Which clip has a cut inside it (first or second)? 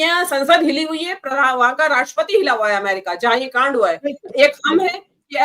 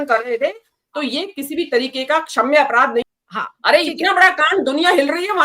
second